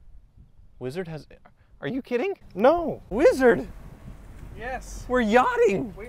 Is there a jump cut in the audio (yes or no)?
yes